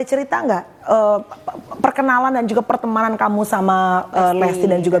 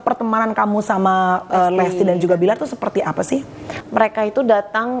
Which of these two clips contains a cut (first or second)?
second